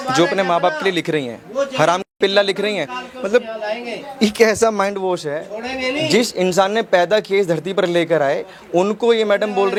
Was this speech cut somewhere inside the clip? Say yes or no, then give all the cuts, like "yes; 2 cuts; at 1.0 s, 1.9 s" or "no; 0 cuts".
no; 0 cuts